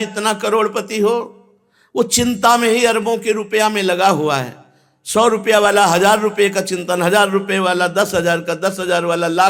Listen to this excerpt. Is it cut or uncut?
uncut